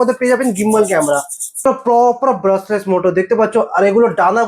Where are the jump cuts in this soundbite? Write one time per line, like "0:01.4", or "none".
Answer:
none